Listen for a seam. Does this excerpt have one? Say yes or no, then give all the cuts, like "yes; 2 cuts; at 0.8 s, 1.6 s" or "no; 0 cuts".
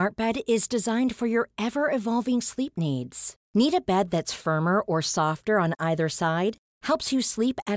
no; 0 cuts